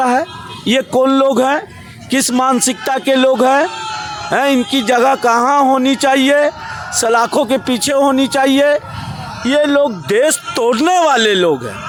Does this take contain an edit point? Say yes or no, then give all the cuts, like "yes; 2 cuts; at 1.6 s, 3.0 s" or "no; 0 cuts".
no; 0 cuts